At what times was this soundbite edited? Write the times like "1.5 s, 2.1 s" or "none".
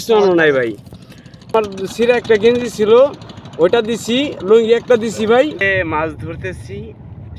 1.5 s, 5.6 s